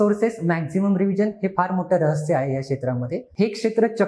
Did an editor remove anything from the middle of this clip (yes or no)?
yes